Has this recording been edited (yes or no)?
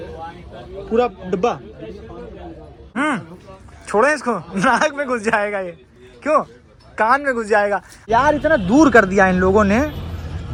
no